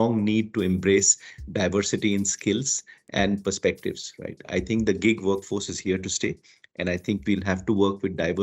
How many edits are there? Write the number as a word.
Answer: zero